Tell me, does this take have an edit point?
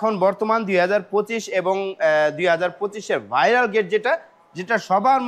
no; 0 cuts

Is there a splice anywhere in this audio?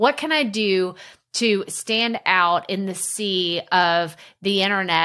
no; 0 cuts

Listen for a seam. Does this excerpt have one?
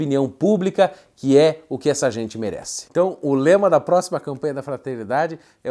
no; 0 cuts

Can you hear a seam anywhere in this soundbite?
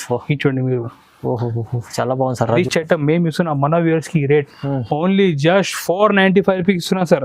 yes; 1 cut; at 2.6 s

